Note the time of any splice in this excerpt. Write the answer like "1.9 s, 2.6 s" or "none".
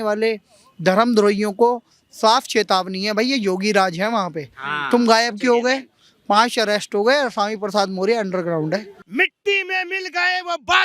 9.0 s